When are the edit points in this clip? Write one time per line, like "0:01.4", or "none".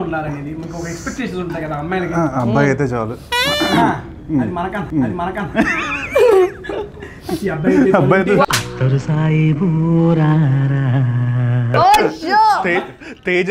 none